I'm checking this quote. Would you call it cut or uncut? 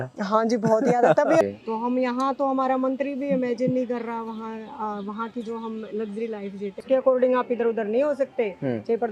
cut